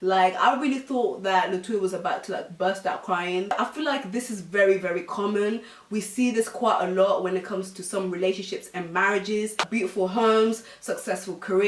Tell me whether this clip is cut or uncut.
cut